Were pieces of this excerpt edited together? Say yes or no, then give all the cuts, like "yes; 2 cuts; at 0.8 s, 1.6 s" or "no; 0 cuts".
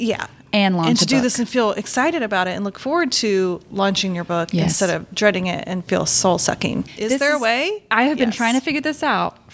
yes; 2 cuts; at 3.6 s, 6.9 s